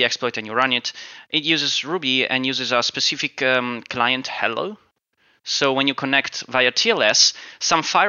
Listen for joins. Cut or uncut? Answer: uncut